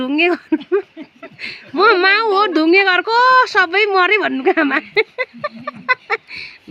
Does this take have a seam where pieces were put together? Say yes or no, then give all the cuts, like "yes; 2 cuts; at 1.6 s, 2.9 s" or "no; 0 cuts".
no; 0 cuts